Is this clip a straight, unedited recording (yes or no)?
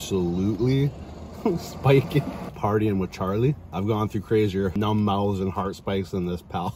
no